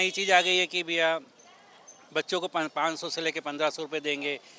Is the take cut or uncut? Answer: uncut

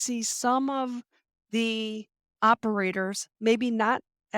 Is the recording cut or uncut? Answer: cut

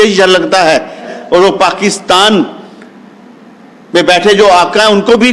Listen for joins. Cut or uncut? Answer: cut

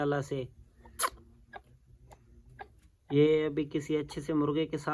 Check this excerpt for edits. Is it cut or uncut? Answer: uncut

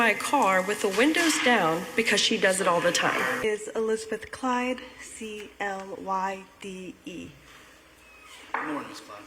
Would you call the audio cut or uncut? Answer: uncut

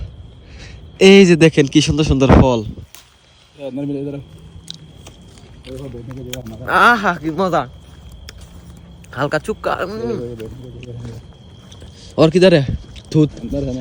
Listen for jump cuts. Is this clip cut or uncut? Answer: uncut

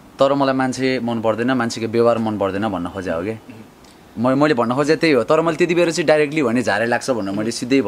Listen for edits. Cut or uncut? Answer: uncut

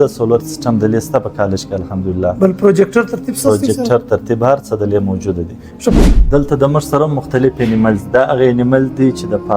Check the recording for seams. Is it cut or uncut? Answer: cut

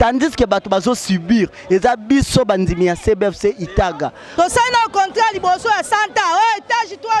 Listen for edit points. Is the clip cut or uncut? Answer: cut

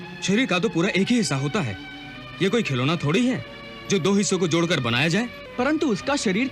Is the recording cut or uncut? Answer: cut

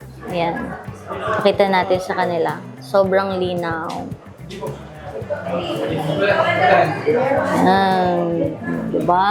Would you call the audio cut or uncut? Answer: uncut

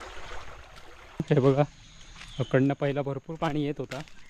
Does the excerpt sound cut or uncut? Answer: cut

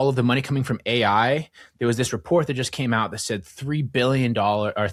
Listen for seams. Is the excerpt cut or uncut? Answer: uncut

